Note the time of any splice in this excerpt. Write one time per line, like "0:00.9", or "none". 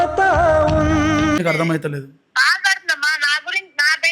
0:01.4

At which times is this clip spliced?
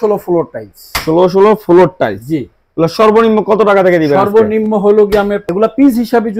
0:05.4

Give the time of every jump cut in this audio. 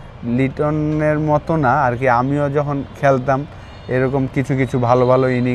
none

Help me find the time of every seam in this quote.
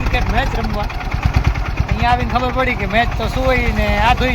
none

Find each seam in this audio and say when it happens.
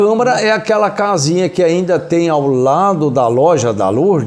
none

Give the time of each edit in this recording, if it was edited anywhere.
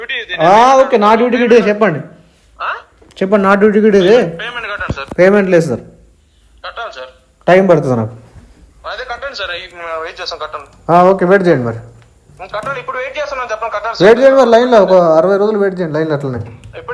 none

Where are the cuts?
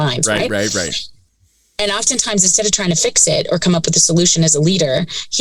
none

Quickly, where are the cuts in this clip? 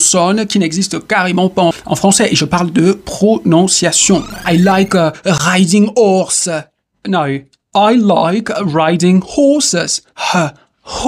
0:01.7
0:04.3

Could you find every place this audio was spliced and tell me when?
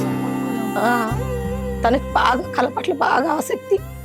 none

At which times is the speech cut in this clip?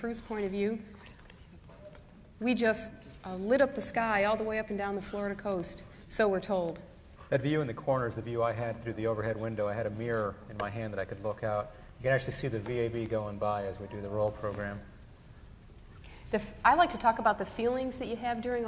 0:13.5

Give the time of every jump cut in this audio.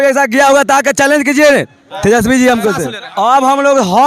0:03.0

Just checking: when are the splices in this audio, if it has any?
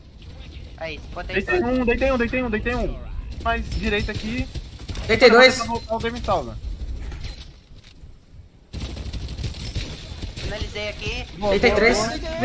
none

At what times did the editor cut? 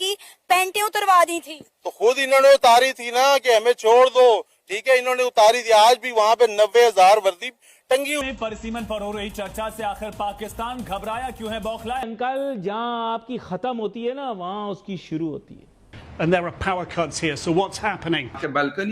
0:08.4
0:12.1

